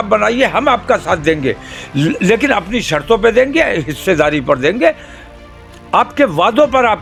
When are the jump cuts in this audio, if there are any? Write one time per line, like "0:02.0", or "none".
none